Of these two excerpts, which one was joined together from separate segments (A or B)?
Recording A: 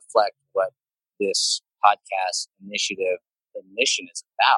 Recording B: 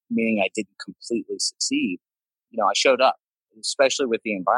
B